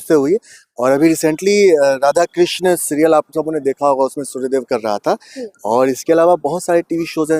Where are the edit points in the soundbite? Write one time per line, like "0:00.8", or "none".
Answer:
none